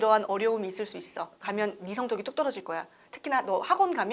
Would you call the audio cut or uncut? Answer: uncut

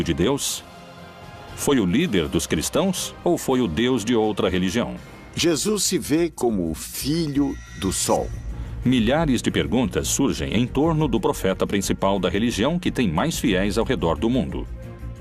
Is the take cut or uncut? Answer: uncut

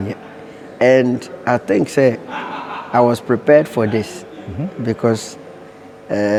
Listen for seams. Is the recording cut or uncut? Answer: uncut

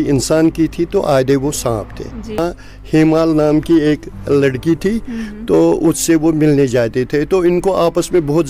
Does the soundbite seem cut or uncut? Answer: cut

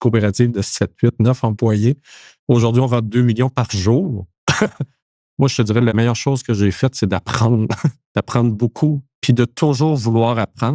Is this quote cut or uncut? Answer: cut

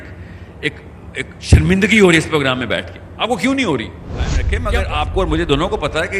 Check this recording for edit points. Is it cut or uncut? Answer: cut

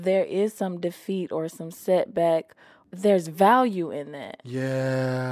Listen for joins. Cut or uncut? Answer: uncut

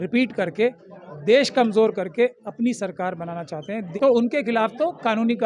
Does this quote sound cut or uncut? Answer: cut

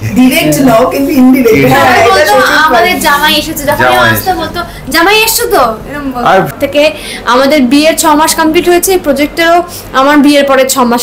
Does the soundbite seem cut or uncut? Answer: cut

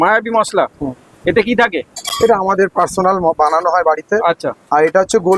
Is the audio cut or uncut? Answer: uncut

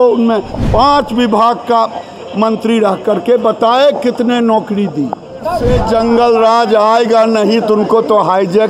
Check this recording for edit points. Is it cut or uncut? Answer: cut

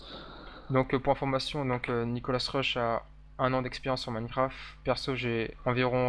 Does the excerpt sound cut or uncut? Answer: uncut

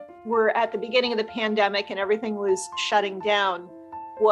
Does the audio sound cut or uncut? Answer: uncut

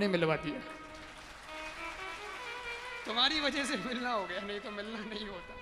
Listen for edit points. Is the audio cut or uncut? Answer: uncut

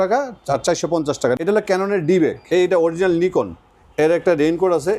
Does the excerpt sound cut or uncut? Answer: cut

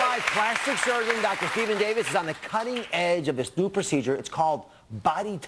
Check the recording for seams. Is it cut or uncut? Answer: uncut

